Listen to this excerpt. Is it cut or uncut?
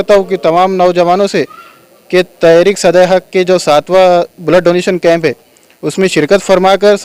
uncut